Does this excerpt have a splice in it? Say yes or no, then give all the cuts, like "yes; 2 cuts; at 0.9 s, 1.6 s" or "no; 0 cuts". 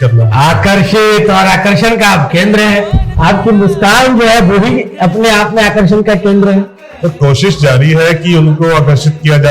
no; 0 cuts